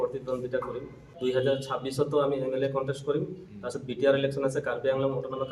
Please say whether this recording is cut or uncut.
uncut